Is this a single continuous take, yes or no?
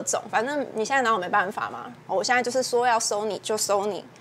yes